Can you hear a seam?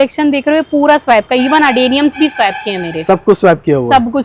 no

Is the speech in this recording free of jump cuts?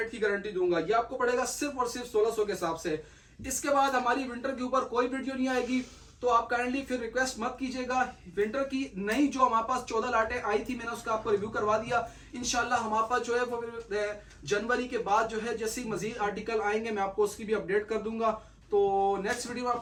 yes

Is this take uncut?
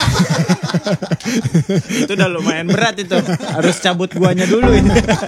yes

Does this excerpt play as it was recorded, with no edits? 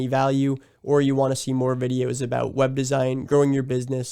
yes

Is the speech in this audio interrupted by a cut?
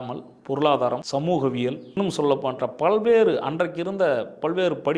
yes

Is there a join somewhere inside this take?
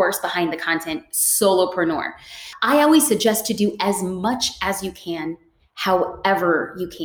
yes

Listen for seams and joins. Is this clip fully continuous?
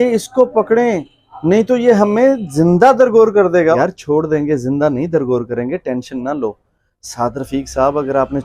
no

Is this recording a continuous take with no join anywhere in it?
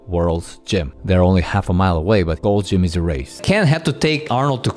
no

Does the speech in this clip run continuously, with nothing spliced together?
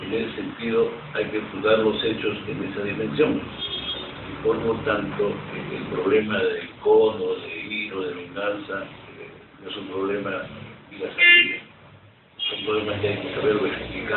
yes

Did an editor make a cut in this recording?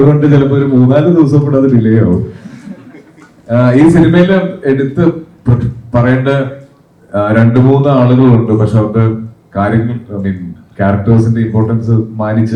no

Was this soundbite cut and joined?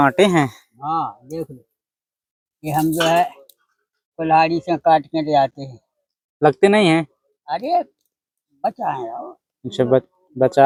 no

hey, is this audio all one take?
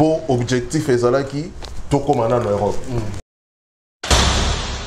no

